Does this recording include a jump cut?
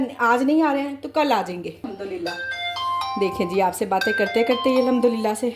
yes; 1 cut; at 1.8 s

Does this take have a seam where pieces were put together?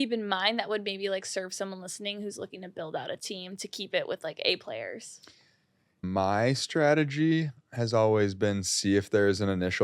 yes; 1 cut; at 6.0 s

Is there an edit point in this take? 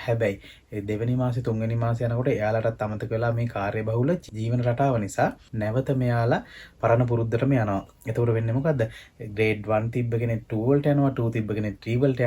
yes; 2 cuts; at 4.3 s, 5.5 s

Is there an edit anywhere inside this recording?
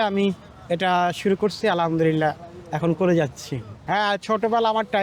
no; 0 cuts

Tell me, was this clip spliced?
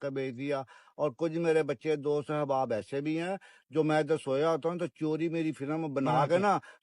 no; 0 cuts

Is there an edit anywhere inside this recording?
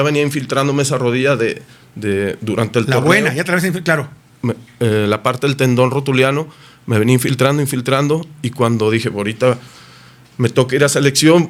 no; 0 cuts

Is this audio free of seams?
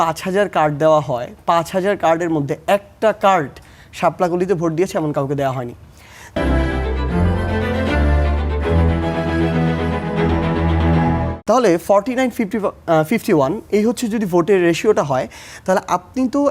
yes; 0 cuts

